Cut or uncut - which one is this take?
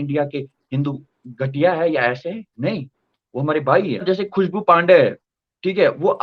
cut